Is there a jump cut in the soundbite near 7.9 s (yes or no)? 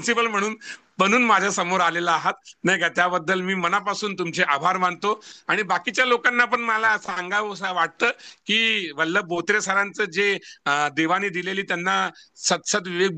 no